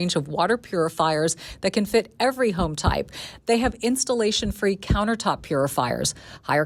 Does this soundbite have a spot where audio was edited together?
no; 0 cuts

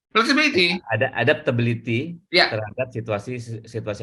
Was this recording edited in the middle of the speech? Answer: no; 0 cuts

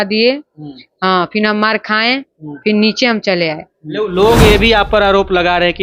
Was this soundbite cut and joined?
yes; 1 cut; at 4.1 s

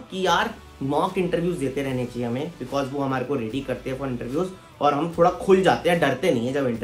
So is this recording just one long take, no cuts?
yes; 0 cuts

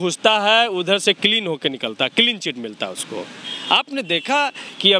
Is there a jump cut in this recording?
no; 0 cuts

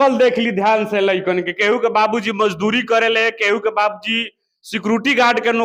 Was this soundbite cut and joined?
no; 0 cuts

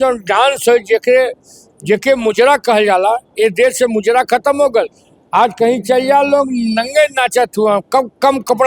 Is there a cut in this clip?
no; 0 cuts

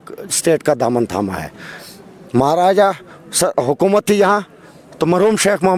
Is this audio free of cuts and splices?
yes; 0 cuts

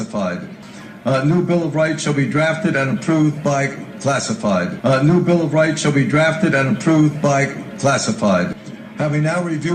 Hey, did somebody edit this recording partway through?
yes; 3 cuts; at 0.9 s, 4.7 s, 8.5 s

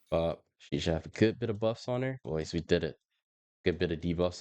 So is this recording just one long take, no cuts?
no; 1 cut; at 2.2 s

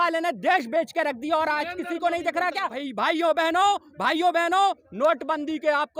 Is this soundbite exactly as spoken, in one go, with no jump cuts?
no; 1 cut; at 2.8 s

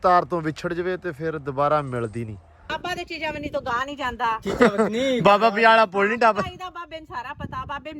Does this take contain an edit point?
yes; 1 cut; at 2.7 s

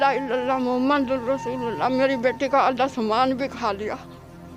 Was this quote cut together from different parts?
no; 0 cuts

